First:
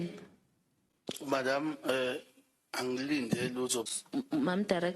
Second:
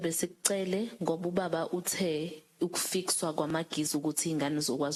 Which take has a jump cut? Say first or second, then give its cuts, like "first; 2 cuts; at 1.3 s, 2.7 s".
first; 2 cuts; at 1.0 s, 3.9 s